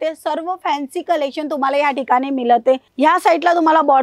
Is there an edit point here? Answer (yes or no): yes